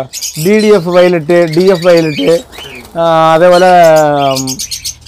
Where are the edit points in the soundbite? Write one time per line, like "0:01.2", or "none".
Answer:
none